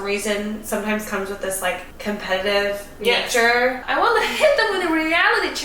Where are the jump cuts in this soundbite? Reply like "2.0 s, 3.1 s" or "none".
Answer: 1.9 s, 3.8 s

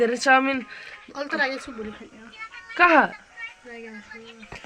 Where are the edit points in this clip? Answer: none

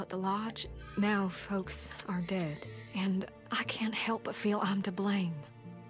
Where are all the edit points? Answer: none

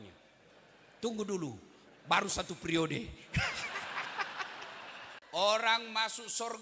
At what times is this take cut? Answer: 5.1 s

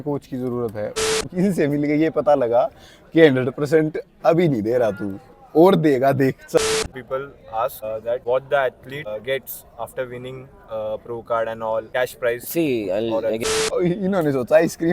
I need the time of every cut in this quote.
1.2 s, 6.6 s, 13.4 s

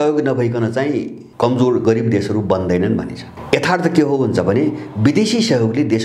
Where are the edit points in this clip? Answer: 1.2 s, 3.3 s

